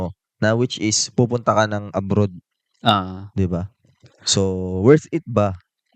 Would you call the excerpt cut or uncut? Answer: uncut